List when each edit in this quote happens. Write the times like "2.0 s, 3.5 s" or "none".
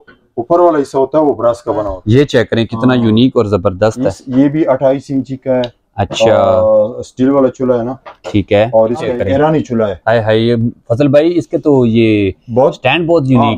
1.9 s, 9.1 s

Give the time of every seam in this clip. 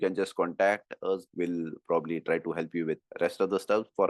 1.3 s, 3.1 s

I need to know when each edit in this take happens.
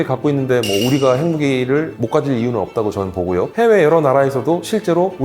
3.5 s

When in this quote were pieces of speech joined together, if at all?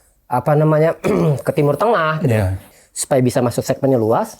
2.7 s

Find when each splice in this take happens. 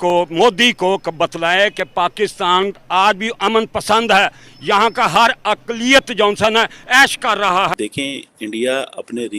7.7 s

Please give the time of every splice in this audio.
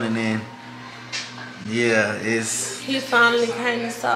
none

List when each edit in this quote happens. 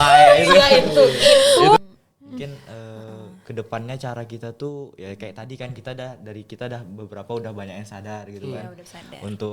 1.8 s

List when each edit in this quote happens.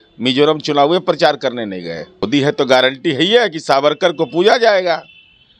2.2 s

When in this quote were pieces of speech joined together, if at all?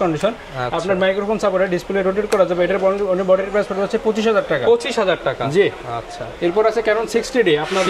none

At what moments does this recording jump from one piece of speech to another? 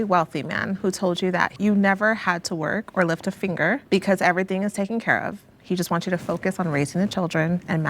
1.5 s, 3.8 s

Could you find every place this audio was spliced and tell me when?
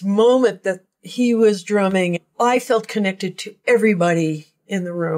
2.1 s

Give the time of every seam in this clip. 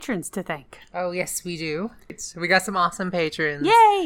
2.2 s

